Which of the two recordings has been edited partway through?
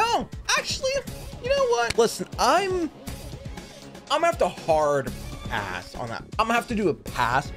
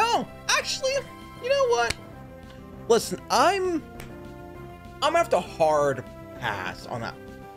first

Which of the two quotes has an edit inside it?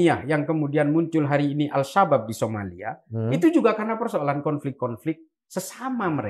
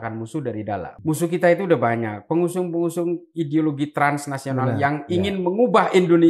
second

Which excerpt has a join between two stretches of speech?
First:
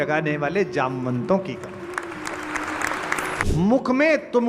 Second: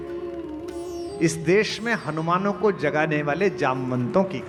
first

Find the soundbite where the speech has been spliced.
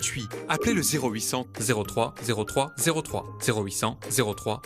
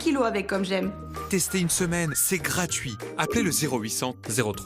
second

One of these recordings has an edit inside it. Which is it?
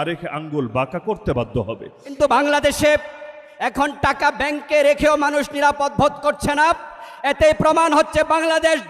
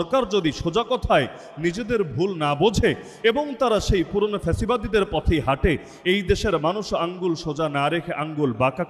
first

